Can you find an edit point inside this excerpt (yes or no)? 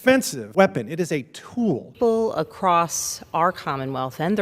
yes